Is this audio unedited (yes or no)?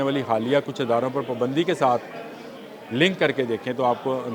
yes